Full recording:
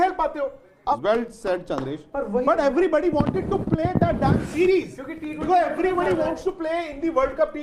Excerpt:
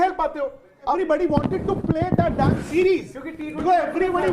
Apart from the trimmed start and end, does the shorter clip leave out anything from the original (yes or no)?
yes